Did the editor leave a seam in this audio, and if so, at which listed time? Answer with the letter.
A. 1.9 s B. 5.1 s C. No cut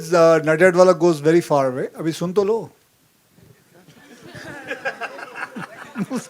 C